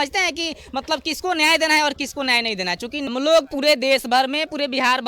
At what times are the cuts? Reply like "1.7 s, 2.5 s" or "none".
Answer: 3.1 s